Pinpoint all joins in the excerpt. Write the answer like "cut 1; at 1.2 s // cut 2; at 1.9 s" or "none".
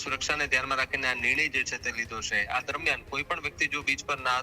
cut 1; at 2.5 s